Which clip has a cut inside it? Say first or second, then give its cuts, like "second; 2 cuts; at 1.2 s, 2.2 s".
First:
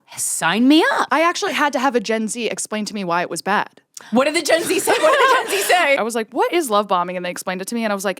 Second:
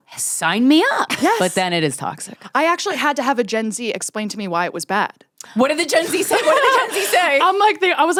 first; 2 cuts; at 1.1 s, 6.0 s